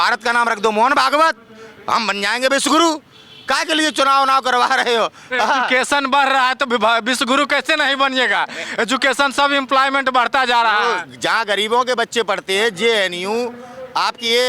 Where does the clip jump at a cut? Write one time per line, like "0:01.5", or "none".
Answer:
none